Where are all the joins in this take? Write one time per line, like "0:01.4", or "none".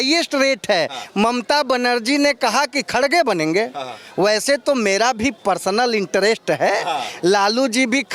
none